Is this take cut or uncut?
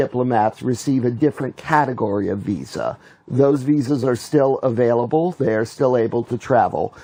uncut